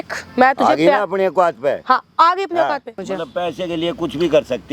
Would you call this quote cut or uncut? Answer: cut